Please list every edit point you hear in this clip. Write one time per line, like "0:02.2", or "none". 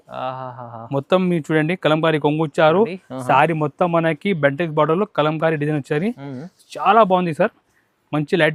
none